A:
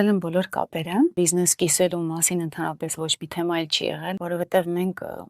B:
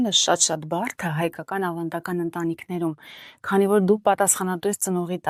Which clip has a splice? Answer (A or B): A